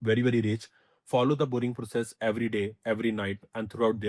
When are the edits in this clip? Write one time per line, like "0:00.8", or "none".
none